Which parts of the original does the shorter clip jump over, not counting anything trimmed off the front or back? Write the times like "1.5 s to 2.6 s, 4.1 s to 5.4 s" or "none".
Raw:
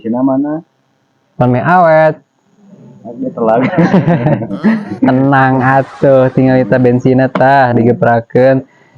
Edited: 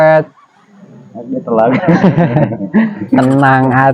none